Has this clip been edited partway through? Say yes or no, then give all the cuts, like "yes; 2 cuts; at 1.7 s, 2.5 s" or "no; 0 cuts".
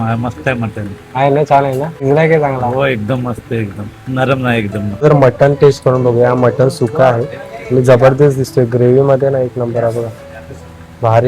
yes; 2 cuts; at 2.0 s, 5.0 s